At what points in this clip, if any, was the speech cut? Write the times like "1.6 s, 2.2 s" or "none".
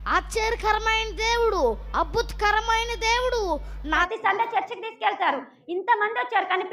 4.1 s